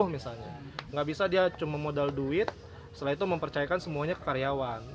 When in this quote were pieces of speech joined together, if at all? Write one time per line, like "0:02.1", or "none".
none